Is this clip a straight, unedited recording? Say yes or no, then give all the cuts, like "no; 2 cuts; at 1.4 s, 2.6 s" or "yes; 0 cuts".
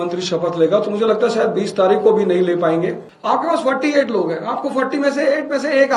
no; 1 cut; at 3.1 s